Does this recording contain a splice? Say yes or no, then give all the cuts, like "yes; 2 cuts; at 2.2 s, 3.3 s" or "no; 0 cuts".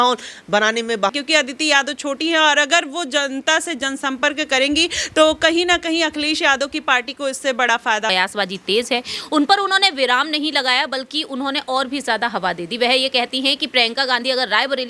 yes; 2 cuts; at 1.1 s, 8.1 s